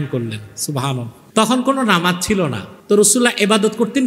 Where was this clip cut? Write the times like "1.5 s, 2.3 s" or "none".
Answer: 1.2 s, 2.7 s